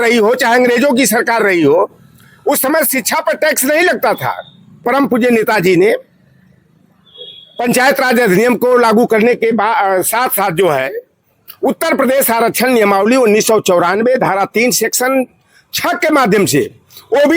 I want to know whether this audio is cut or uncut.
cut